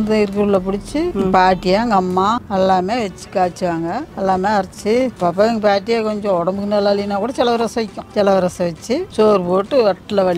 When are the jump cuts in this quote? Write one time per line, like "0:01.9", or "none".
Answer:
0:01.1
0:02.4
0:04.1
0:05.1
0:08.0
0:09.1